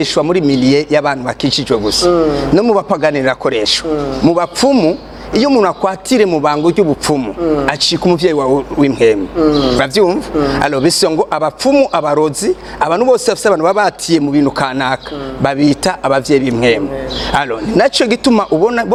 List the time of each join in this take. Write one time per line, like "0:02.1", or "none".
none